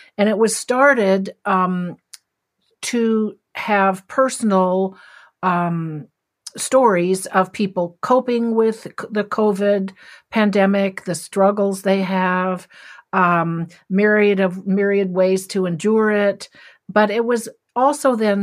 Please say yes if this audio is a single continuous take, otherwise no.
yes